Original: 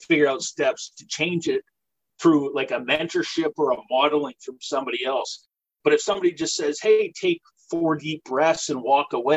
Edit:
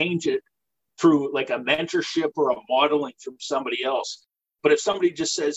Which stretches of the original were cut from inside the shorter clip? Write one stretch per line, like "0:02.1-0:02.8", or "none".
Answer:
none